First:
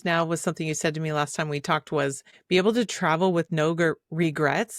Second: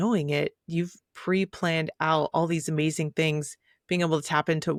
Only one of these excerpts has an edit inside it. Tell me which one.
first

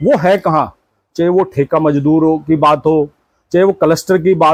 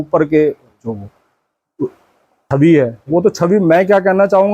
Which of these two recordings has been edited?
second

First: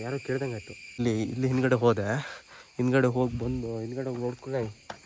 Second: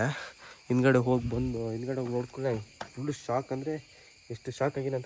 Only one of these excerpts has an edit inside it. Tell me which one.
first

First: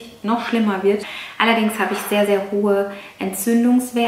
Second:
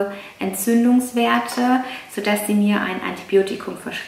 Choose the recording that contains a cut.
first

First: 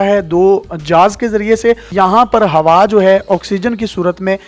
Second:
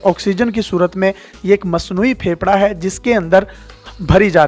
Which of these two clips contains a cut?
first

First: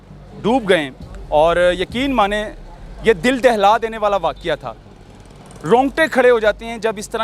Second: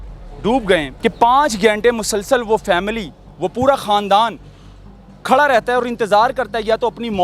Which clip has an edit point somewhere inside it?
second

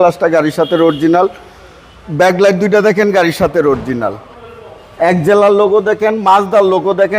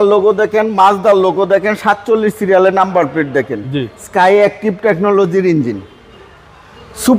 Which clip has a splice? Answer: first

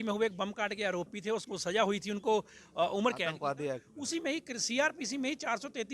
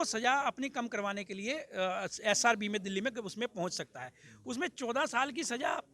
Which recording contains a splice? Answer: first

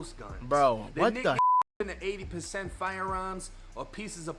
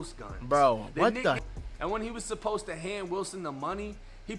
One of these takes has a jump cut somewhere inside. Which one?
second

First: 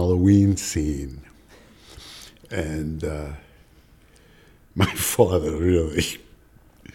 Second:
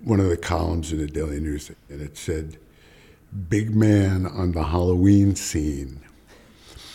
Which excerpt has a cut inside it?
second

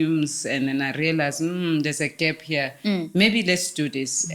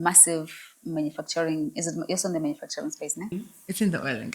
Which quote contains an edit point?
second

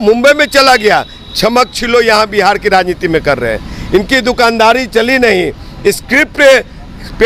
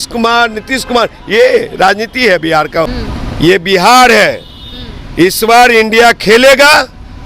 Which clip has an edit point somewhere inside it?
second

